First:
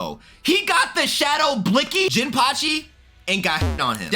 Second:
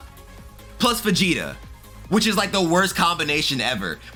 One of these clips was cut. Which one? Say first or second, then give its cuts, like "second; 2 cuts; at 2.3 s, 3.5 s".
first; 1 cut; at 2.1 s